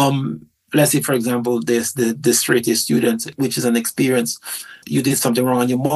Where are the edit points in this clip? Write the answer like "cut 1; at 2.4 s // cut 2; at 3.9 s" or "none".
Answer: cut 1; at 3.3 s // cut 2; at 4.8 s

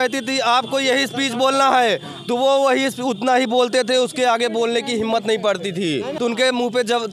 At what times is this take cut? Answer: cut 1; at 6.1 s

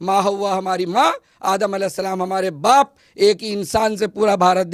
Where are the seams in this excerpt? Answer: none

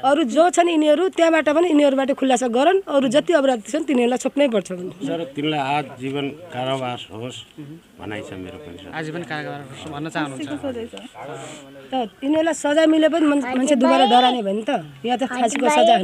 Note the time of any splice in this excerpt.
cut 1; at 5.1 s // cut 2; at 11.9 s

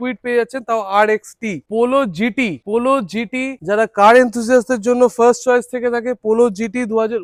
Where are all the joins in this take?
none

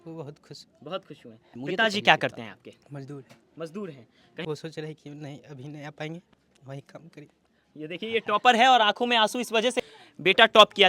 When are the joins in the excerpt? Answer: cut 1; at 1.6 s // cut 2; at 4.4 s // cut 3; at 9.8 s

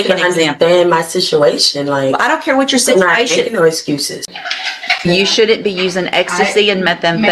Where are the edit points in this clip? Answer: cut 1; at 4.3 s

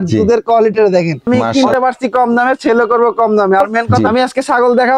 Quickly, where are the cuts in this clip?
cut 1; at 1.4 s // cut 2; at 3.9 s

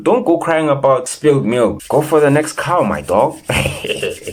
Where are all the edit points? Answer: none

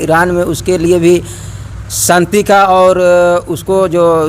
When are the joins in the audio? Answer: none

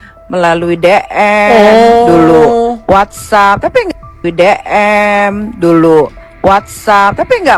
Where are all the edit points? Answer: none

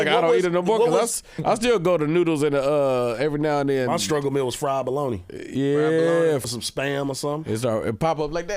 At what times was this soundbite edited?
cut 1; at 6.4 s

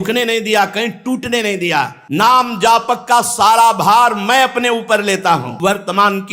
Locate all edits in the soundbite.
cut 1; at 2.0 s // cut 2; at 5.5 s

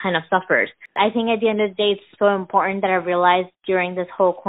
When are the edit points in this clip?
cut 1; at 0.9 s

